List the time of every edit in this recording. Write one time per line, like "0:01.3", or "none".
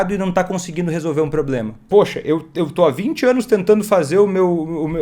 0:01.8